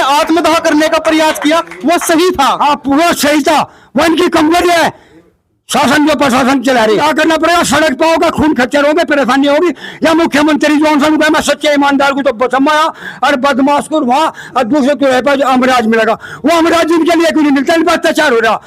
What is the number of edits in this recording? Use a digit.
1